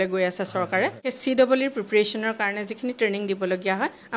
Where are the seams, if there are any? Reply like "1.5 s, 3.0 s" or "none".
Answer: 1.1 s